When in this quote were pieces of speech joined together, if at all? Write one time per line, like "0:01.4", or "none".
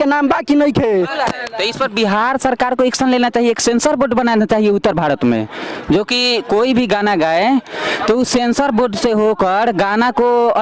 none

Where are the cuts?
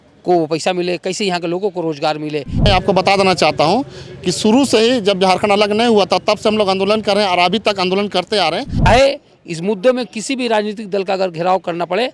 0:02.7
0:08.9

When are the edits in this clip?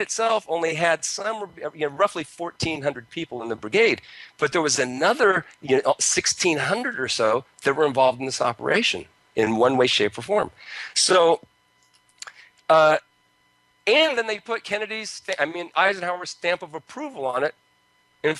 0:10.7

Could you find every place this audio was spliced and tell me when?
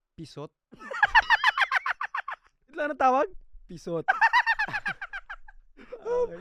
none

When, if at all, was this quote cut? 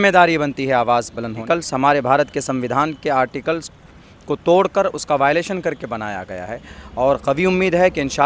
0:01.4
0:06.7

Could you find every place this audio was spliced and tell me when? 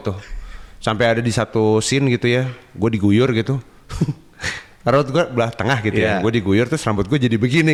none

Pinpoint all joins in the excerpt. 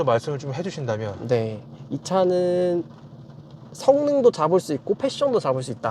none

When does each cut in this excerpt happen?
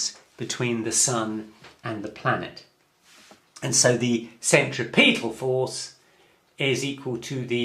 0:04.6

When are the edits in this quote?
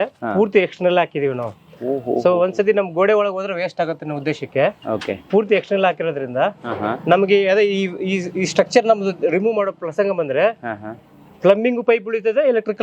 none

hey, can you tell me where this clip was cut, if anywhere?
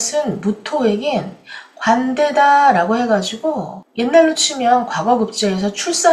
none

